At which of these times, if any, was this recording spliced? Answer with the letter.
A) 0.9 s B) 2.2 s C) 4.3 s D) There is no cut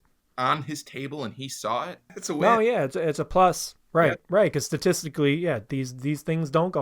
B